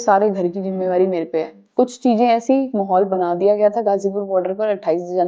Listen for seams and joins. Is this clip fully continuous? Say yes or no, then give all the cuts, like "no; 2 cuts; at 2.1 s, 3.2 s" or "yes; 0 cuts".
no; 1 cut; at 1.6 s